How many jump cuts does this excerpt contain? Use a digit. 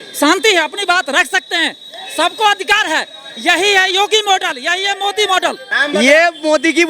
1